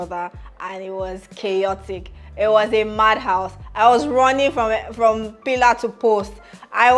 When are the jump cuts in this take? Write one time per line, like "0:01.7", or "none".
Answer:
none